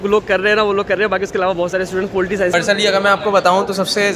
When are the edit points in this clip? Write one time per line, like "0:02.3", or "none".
0:02.5